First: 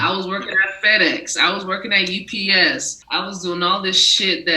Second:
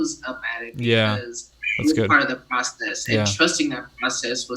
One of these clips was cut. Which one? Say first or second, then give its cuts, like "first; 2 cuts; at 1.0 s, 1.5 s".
first; 1 cut; at 2.9 s